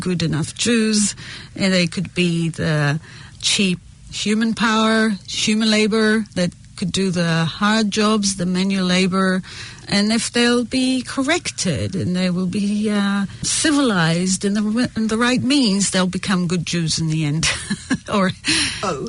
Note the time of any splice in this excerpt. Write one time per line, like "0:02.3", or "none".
none